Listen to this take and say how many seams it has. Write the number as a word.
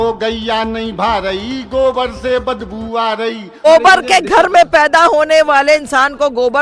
one